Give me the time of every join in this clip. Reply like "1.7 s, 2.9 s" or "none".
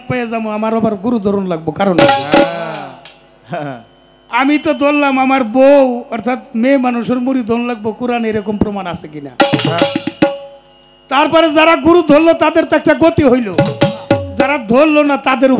none